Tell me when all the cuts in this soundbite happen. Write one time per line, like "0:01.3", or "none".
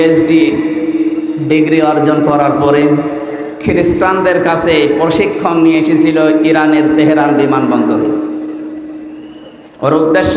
none